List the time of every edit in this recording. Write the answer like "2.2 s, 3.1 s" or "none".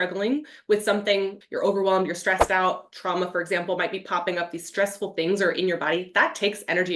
1.4 s